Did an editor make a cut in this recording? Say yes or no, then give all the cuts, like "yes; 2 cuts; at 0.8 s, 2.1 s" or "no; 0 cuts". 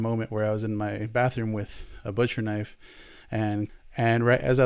yes; 1 cut; at 3.7 s